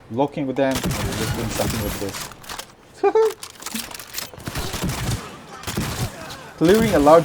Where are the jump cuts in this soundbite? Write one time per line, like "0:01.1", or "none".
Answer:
0:04.5